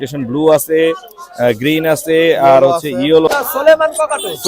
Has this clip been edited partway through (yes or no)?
yes